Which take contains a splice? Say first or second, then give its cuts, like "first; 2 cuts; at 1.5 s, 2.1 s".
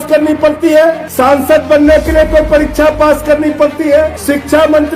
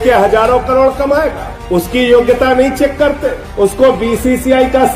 first; 2 cuts; at 1.1 s, 4.2 s